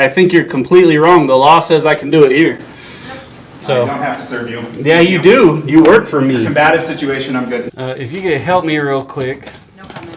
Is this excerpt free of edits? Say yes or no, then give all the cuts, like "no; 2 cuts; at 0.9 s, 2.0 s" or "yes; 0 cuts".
no; 2 cuts; at 3.5 s, 7.7 s